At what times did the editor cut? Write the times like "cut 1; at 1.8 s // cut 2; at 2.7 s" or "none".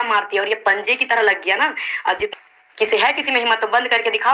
cut 1; at 2.3 s